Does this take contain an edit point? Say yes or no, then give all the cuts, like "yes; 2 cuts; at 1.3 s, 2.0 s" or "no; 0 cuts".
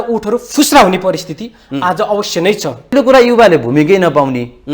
yes; 1 cut; at 2.9 s